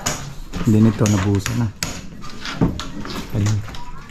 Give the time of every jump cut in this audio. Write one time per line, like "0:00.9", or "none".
none